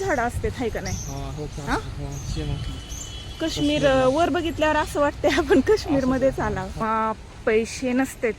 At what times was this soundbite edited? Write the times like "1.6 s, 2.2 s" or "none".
6.8 s